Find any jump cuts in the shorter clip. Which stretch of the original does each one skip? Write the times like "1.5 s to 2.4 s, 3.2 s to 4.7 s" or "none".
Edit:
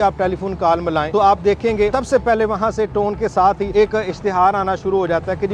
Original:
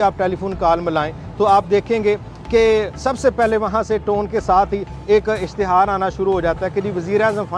1.1 s to 1.3 s, 2.2 s to 3.0 s, 4.8 s to 5.0 s